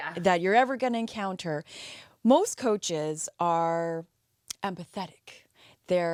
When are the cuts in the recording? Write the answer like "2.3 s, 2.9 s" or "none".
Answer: none